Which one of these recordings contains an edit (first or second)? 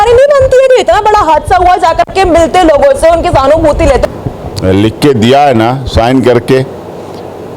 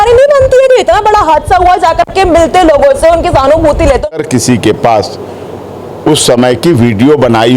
second